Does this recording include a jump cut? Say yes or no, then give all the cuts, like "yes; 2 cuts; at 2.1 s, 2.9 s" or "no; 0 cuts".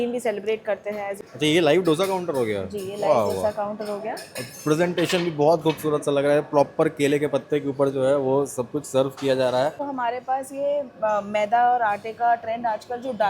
yes; 2 cuts; at 1.3 s, 9.9 s